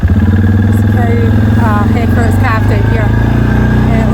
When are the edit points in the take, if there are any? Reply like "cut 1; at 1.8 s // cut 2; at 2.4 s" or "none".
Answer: none